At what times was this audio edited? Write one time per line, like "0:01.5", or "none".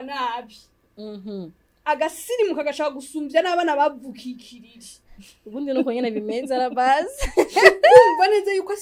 none